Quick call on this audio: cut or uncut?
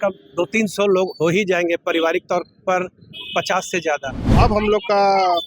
cut